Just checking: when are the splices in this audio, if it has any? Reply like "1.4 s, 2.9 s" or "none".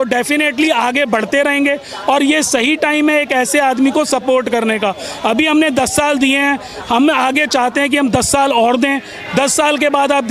none